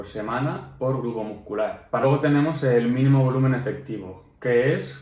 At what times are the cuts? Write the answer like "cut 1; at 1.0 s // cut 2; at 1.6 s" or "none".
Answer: cut 1; at 2.0 s